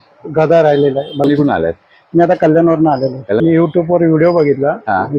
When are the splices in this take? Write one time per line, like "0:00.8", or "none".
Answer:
0:01.2
0:03.4